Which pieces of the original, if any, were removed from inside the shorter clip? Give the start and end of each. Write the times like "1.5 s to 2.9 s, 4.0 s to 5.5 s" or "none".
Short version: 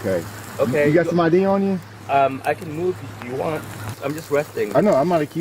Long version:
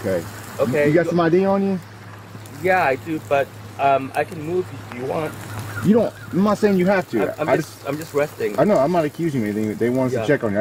1.9 s to 3.6 s, 5.6 s to 7.8 s